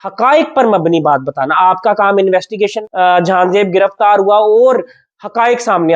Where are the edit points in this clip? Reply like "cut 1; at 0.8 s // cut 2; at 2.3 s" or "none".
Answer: cut 1; at 2.8 s